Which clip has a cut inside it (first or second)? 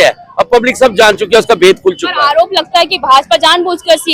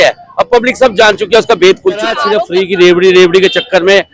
second